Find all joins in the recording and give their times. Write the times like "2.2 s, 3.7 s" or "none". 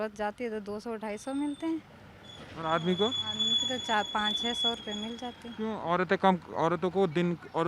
none

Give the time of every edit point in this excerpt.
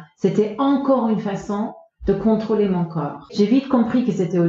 3.3 s

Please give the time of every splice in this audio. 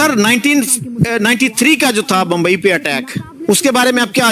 none

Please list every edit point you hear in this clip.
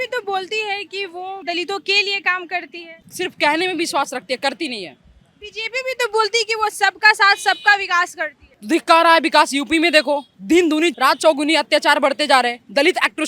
1.4 s

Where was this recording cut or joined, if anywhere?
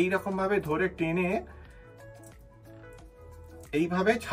none

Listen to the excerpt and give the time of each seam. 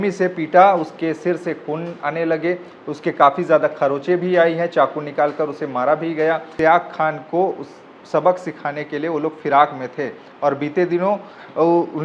6.5 s

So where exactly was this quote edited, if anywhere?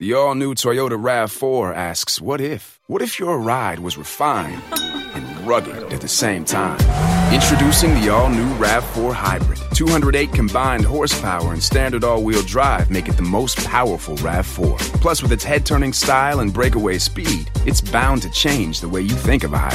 none

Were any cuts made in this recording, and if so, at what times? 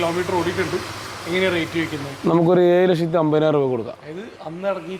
none

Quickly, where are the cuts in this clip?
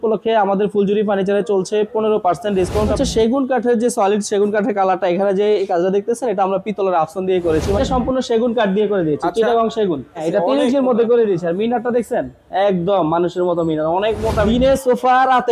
3.0 s, 7.8 s, 10.2 s, 14.4 s

